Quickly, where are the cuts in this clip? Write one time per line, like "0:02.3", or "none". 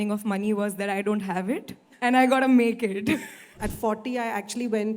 0:01.8
0:03.5